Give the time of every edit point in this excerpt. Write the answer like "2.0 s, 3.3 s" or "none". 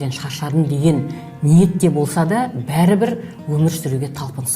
none